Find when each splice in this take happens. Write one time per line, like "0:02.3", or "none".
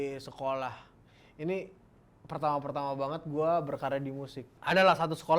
0:04.5